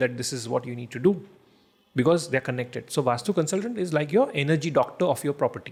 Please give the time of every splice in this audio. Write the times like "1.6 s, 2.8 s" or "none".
none